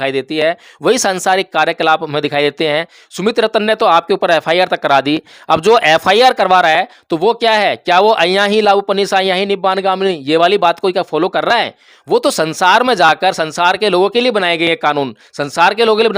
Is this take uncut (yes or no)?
yes